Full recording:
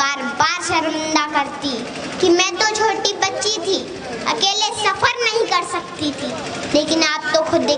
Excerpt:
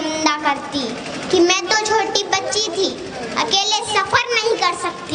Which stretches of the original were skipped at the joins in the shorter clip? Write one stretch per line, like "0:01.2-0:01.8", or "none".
none